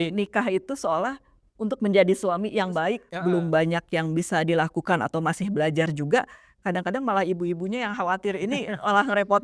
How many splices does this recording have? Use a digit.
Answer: 1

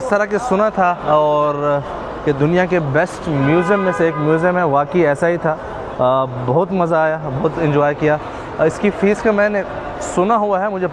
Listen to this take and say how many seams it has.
0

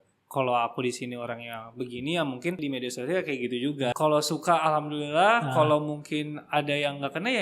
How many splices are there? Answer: 2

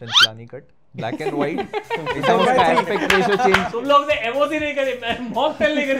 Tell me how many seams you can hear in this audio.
1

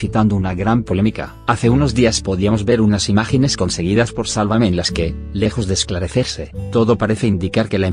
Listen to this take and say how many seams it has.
1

